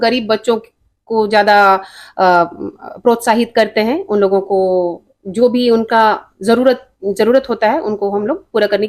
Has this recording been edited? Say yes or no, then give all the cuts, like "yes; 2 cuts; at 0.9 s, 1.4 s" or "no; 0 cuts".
no; 0 cuts